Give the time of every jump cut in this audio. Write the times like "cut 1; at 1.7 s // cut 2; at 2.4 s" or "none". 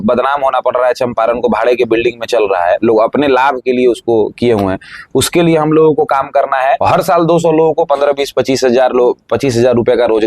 cut 1; at 6.8 s